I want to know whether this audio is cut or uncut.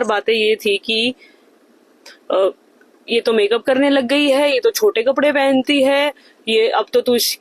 uncut